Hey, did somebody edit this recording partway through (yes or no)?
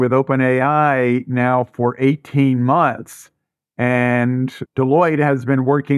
no